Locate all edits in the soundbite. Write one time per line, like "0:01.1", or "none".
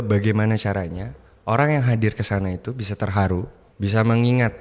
0:03.6